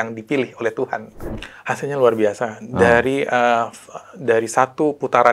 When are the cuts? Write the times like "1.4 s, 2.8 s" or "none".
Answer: 1.2 s